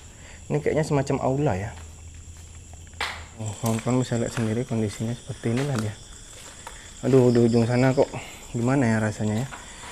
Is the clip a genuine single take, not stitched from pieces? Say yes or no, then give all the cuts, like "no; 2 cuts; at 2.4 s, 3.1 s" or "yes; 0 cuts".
no; 1 cut; at 3.5 s